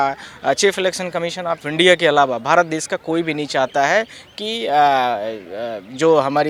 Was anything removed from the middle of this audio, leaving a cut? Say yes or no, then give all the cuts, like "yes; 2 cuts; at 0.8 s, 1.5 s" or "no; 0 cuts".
no; 0 cuts